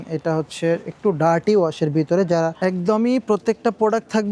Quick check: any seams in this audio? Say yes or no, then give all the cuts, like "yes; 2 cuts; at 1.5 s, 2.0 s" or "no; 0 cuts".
yes; 1 cut; at 2.5 s